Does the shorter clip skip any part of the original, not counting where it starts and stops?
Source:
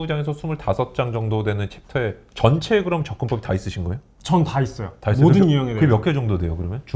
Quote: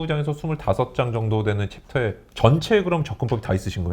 no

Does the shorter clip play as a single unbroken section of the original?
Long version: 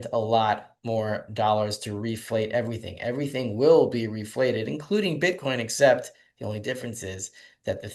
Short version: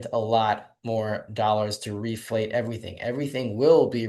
yes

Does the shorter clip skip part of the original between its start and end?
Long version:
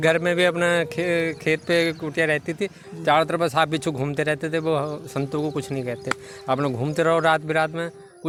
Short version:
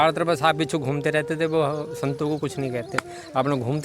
no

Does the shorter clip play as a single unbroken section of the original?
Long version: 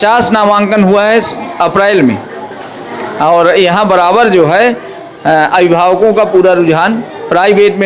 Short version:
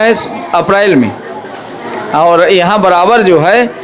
yes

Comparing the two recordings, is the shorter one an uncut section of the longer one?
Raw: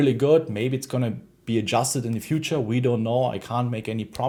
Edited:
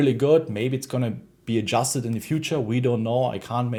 yes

